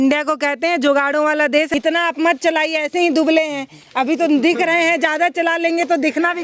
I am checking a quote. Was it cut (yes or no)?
yes